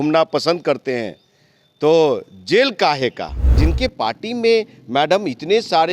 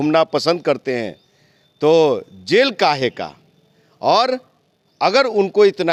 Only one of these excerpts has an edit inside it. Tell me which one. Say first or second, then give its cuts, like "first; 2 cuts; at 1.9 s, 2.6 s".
first; 1 cut; at 3.6 s